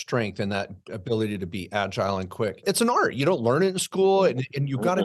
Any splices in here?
yes; 1 cut; at 2.6 s

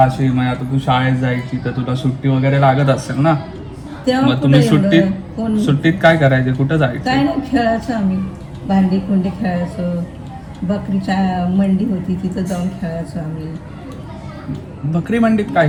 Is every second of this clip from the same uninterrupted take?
yes; 0 cuts

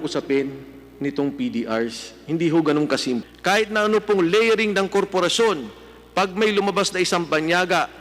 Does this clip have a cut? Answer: yes; 1 cut; at 3.3 s

